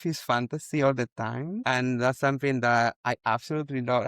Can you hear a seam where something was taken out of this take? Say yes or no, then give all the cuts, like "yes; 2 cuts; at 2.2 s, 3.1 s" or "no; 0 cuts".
yes; 2 cuts; at 1.6 s, 3.0 s